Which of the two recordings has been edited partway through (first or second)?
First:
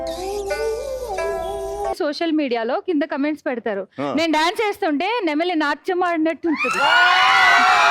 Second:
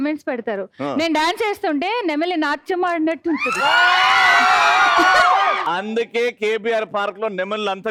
first